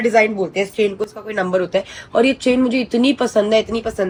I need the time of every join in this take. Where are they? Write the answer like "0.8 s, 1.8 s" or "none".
none